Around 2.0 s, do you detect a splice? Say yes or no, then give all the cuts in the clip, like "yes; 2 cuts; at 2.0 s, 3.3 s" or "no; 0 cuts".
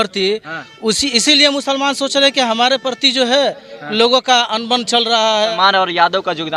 no; 1 cut; at 5.5 s